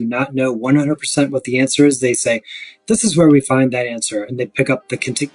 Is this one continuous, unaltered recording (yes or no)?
yes